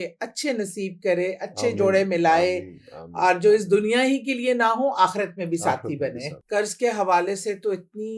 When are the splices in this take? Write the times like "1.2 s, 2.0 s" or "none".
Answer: 6.3 s